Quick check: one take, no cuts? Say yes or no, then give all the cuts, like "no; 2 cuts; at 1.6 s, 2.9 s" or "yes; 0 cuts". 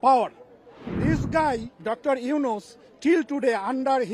no; 1 cut; at 0.9 s